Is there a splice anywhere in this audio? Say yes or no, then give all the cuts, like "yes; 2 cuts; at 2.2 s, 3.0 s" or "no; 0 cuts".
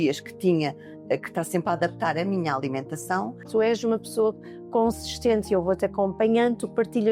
yes; 1 cut; at 3.5 s